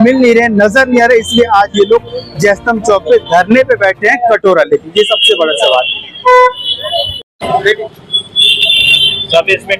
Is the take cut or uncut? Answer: uncut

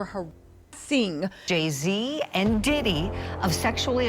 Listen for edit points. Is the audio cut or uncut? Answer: cut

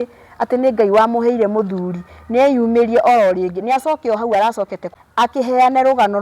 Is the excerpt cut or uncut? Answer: cut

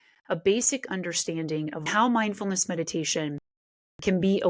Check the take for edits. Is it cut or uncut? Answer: cut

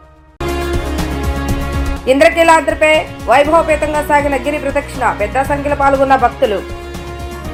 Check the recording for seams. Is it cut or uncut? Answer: uncut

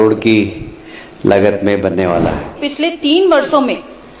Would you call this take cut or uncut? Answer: cut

